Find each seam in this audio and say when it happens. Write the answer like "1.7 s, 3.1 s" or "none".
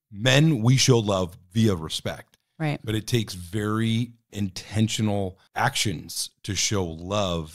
4.3 s, 5.4 s